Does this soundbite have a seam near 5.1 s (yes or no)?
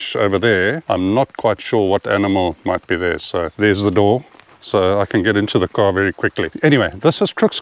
no